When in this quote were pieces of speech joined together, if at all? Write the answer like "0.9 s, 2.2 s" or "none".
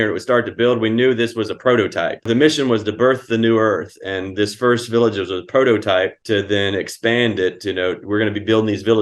2.3 s, 6.2 s